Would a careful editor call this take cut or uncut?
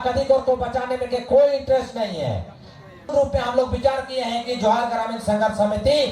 cut